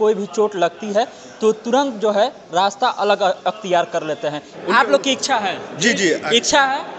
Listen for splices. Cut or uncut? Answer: cut